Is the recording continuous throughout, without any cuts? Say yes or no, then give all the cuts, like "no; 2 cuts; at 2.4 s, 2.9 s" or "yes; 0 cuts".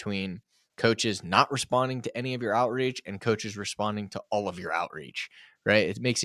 yes; 0 cuts